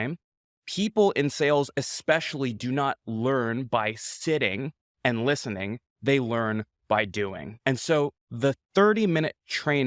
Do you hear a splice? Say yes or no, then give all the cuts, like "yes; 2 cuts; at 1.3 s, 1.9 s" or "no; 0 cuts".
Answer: yes; 2 cuts; at 7.5 s, 8.2 s